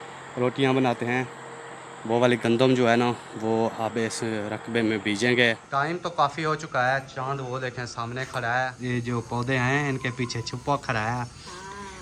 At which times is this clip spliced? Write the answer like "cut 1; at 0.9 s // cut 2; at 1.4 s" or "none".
cut 1; at 5.6 s // cut 2; at 8.8 s